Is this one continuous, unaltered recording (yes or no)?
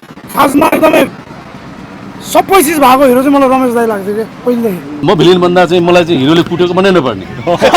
no